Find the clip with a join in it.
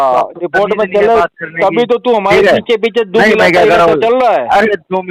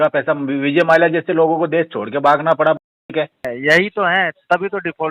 second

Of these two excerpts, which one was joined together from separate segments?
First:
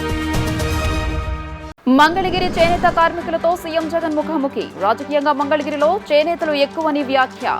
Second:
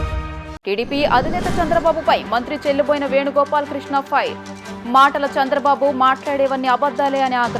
first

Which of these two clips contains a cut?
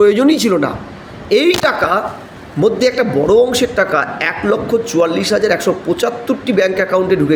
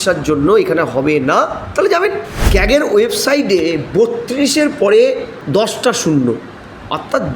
second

